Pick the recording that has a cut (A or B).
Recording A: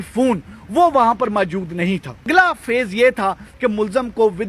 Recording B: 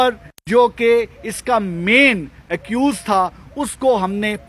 A